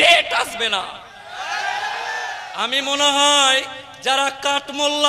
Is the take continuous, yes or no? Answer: no